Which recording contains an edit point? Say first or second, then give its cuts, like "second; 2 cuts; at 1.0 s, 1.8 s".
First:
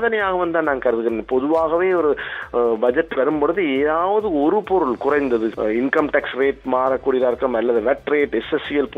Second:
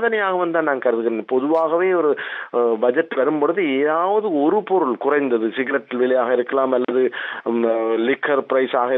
first; 1 cut; at 5.5 s